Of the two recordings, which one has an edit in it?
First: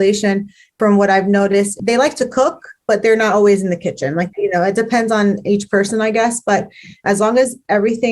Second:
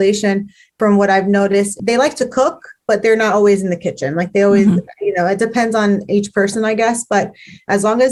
first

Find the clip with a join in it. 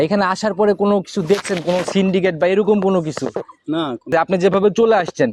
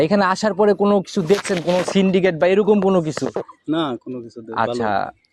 first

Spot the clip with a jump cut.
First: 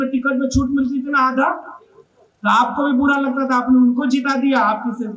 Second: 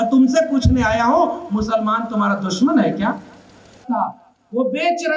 second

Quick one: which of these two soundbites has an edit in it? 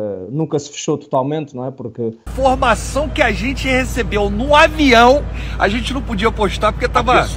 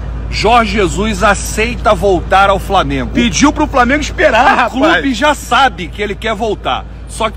first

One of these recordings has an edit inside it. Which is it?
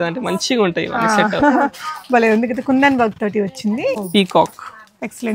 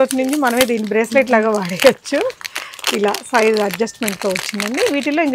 first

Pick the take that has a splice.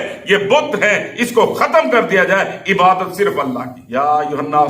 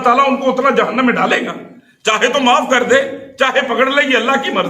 first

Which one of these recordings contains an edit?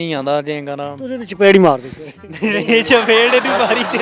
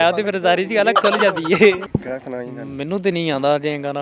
second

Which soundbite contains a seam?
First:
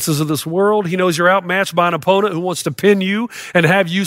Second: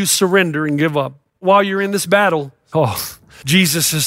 second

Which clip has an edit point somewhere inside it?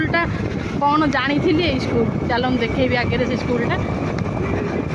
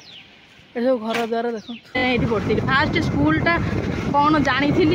second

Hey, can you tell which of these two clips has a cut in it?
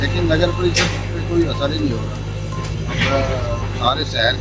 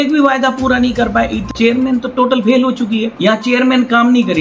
second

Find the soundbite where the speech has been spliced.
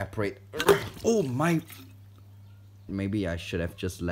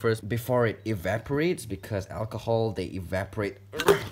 first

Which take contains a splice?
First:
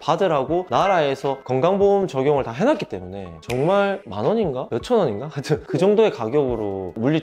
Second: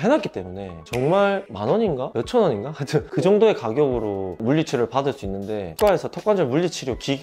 second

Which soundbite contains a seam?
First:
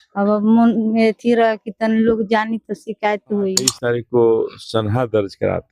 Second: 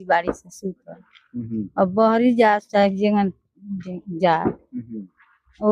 first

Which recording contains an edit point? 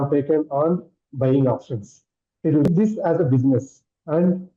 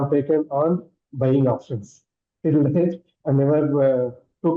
first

